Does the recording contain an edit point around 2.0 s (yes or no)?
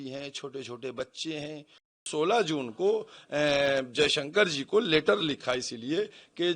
yes